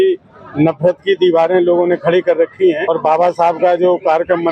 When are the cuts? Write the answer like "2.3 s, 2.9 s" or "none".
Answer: 2.9 s